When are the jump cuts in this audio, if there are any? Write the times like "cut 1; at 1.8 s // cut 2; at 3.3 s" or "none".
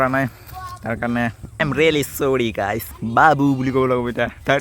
cut 1; at 1.6 s